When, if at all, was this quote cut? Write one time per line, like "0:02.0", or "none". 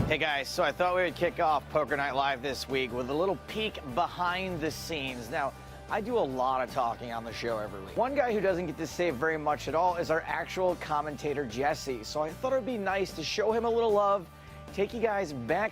0:07.8